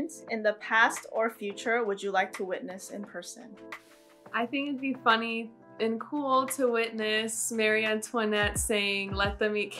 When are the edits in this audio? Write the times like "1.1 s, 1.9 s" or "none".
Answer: none